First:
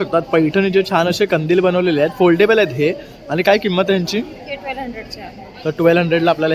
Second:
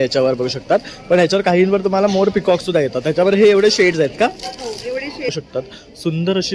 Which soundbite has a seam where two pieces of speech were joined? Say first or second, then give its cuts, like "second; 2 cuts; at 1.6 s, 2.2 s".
second; 1 cut; at 5.3 s